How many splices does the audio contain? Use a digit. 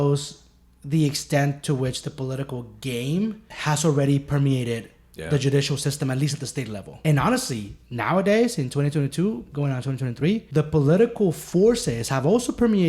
3